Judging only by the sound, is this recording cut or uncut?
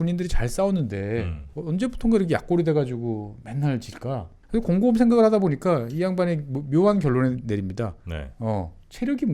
cut